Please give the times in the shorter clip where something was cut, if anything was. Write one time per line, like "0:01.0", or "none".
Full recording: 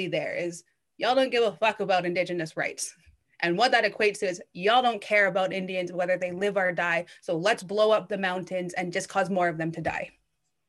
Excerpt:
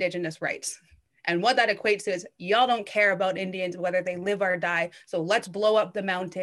none